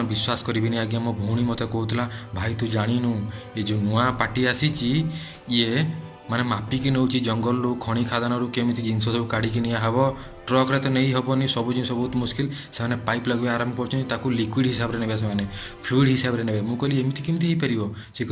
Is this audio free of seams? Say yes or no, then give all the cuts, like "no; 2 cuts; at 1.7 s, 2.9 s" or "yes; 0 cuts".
yes; 0 cuts